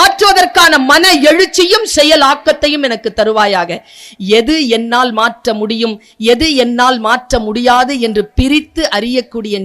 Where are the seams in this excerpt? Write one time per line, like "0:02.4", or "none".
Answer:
none